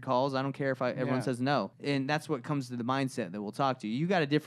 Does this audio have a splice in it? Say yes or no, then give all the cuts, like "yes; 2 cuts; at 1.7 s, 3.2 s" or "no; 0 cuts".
yes; 1 cut; at 1.7 s